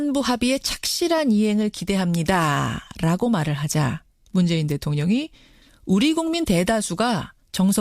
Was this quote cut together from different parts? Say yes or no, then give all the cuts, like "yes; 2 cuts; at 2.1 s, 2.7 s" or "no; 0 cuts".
yes; 1 cut; at 0.9 s